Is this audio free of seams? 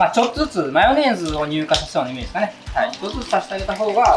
yes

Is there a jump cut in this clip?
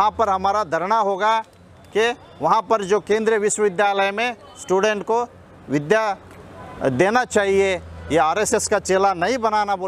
no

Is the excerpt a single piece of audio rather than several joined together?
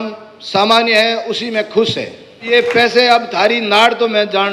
no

